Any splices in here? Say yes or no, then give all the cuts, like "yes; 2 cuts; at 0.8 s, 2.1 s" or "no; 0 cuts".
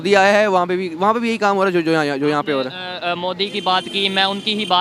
no; 0 cuts